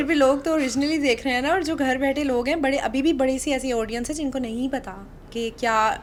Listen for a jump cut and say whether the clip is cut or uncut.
uncut